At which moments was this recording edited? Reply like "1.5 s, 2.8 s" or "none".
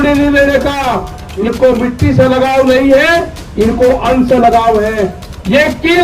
1.4 s